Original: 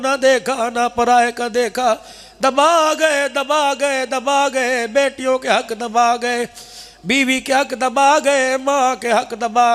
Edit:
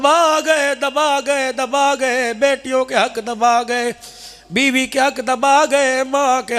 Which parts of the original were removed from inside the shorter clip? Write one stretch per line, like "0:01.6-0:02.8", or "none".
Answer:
none